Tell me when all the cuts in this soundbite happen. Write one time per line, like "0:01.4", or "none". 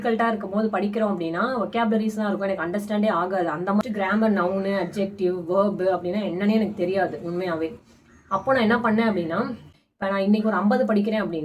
0:03.8
0:09.6